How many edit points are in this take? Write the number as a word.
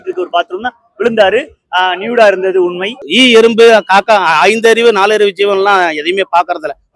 one